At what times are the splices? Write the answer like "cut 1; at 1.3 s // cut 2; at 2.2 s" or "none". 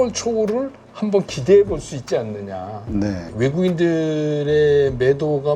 cut 1; at 3.3 s